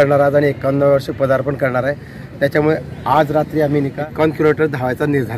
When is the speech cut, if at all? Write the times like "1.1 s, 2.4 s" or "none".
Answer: 4.0 s